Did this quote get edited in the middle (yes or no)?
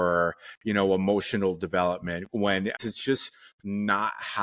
yes